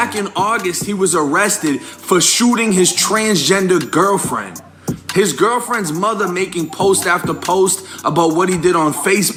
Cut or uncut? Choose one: uncut